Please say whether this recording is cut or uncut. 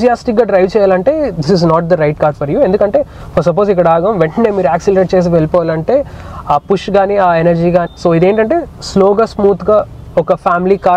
uncut